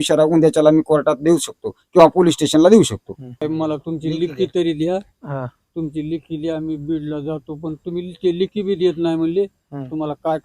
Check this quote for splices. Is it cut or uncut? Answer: cut